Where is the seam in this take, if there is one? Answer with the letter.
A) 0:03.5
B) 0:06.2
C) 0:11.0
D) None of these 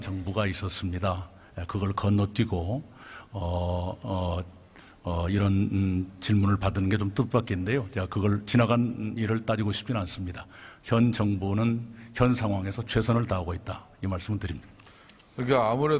C